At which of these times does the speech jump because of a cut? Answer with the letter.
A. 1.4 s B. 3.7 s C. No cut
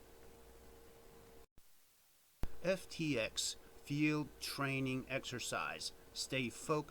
A